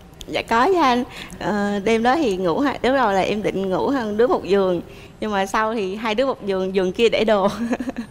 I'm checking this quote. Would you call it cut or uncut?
uncut